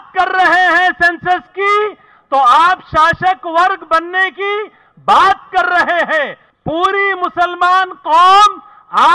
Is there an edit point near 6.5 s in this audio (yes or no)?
yes